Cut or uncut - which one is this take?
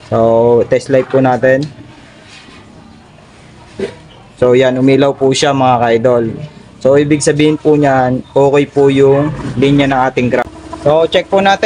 cut